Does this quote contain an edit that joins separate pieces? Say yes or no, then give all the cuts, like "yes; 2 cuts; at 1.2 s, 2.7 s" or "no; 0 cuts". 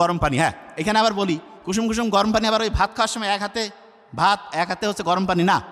no; 0 cuts